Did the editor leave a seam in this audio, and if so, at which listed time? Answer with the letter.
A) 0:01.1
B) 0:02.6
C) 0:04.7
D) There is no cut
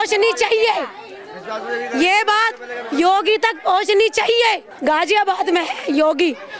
C